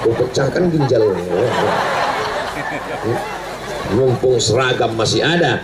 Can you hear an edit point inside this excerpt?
no; 0 cuts

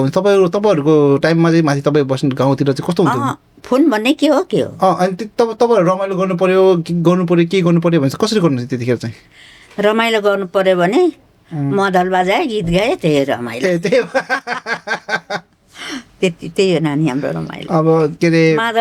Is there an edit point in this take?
no; 0 cuts

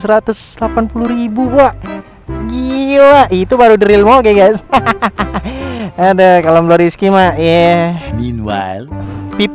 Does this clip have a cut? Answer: no; 0 cuts

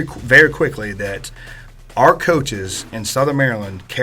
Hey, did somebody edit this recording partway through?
no; 0 cuts

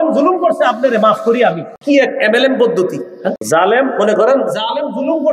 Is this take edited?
yes; 2 cuts; at 1.7 s, 3.4 s

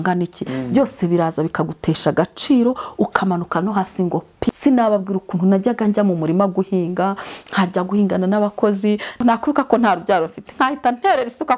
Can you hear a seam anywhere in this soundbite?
yes; 2 cuts; at 4.5 s, 9.1 s

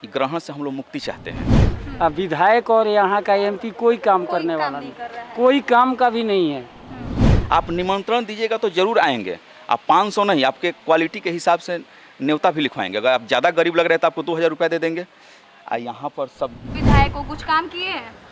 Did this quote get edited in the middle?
yes; 3 cuts; at 1.7 s, 7.4 s, 16.7 s

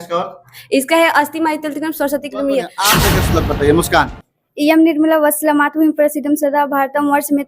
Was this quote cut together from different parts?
yes; 1 cut; at 2.9 s

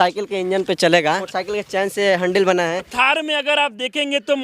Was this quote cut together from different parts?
yes; 2 cuts; at 1.3 s, 2.9 s

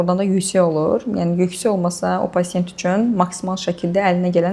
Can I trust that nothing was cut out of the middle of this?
yes; 0 cuts

